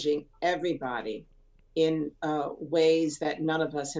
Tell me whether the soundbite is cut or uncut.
uncut